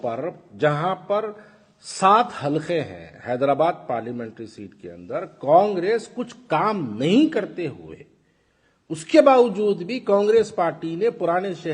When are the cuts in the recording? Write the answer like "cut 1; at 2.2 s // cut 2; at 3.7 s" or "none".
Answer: none

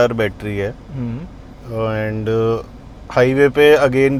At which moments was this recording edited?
none

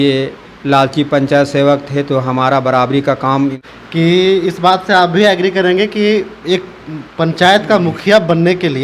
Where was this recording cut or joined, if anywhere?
cut 1; at 3.6 s

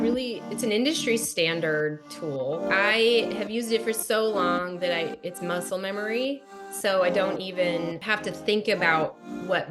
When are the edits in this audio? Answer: cut 1; at 2.7 s // cut 2; at 8.1 s

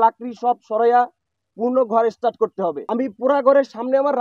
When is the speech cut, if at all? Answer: cut 1; at 2.8 s

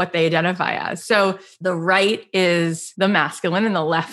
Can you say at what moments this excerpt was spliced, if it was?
cut 1; at 1.5 s // cut 2; at 2.8 s

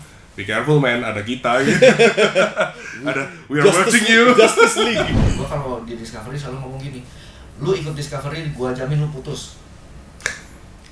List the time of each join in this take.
cut 1; at 5.1 s

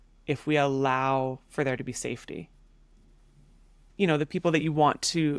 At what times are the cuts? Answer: cut 1; at 3.8 s

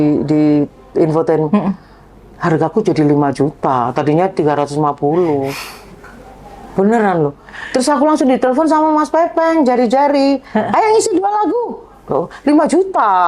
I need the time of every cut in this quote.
none

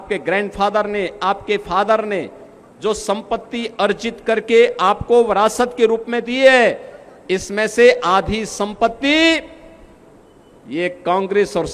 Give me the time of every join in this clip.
none

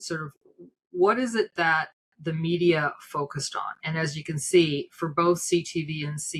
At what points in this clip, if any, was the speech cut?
none

